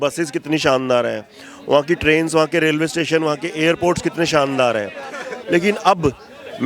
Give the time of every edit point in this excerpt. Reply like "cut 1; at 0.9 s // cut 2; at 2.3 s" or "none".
none